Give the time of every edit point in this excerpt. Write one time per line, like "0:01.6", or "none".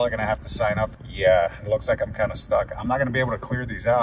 0:01.0